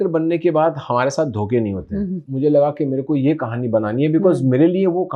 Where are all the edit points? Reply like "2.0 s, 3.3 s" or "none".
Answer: 2.1 s